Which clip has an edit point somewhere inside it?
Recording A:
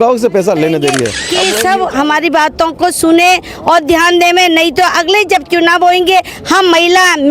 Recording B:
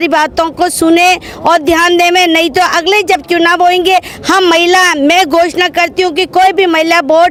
A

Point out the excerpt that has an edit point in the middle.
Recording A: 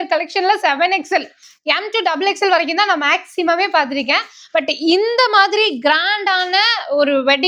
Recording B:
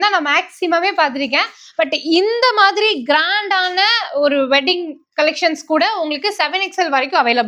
A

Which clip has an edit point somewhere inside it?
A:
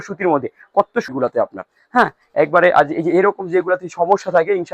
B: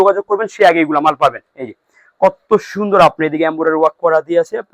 A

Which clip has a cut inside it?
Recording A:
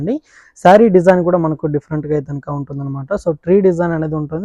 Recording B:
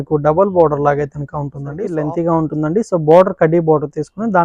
B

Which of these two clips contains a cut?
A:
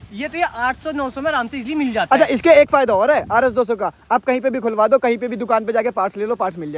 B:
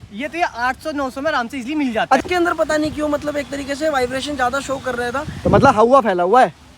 B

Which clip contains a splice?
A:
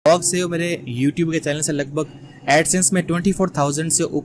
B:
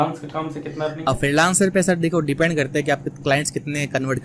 B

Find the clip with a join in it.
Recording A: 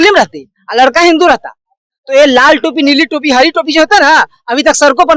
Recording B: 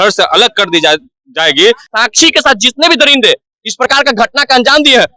B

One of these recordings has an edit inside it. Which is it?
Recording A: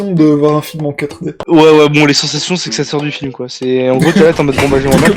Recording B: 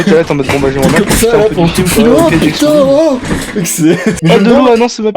B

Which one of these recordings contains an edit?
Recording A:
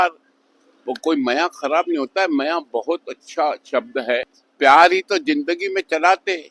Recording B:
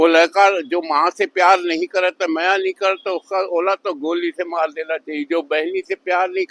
A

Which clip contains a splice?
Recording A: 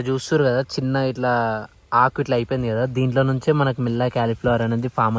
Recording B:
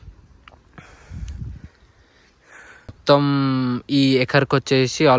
B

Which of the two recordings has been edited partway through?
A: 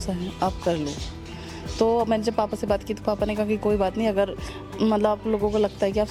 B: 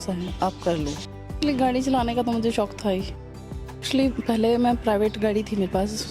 B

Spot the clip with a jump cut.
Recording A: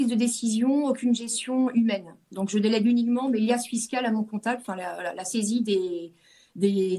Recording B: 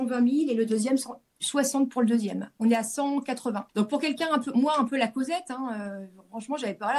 B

